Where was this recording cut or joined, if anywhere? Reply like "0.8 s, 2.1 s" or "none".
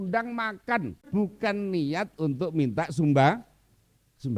1.0 s